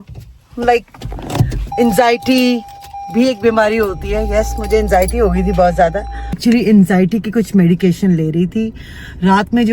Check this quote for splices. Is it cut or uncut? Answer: cut